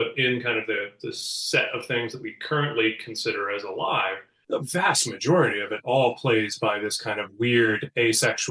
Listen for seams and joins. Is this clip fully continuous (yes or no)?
no